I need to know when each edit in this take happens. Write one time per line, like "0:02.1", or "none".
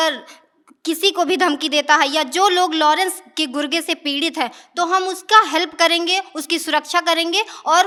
none

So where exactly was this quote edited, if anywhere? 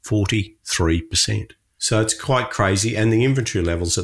0:01.9

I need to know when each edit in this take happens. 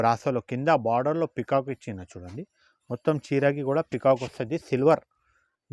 none

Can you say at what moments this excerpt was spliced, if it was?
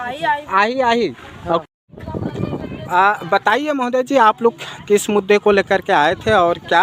0:01.6

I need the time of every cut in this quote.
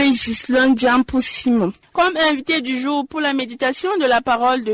0:01.8

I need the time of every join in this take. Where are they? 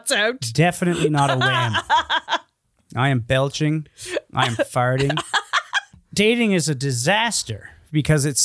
0:05.9

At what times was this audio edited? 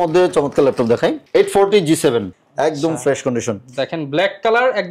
0:02.3

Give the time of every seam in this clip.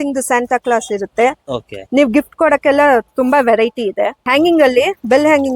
0:04.2

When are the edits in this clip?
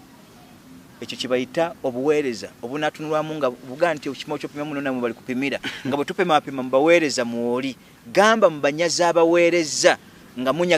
none

